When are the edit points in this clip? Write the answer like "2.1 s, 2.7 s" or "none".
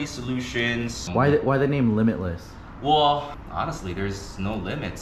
1.1 s, 3.4 s